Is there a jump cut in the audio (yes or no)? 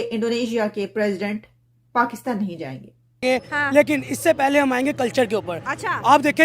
yes